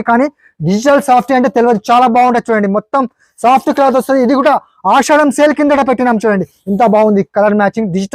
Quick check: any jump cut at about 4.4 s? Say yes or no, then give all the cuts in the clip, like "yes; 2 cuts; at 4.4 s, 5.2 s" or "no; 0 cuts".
no; 0 cuts